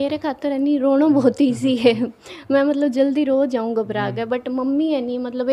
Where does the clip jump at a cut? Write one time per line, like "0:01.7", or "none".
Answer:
none